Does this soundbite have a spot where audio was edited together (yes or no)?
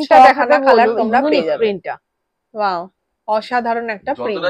no